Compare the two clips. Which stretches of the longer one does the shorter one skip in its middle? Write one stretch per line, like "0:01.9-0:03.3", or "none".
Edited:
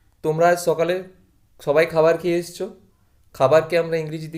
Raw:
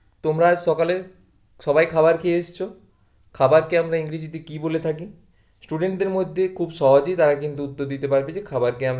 none